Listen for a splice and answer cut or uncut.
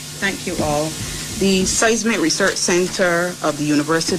uncut